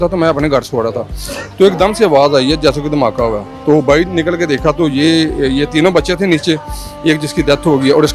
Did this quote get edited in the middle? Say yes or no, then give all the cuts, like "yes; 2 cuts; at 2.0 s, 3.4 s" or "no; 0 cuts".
no; 0 cuts